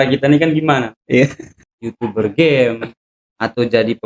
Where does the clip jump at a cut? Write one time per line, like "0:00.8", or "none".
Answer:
0:01.5